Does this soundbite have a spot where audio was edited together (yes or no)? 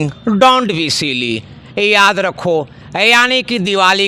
no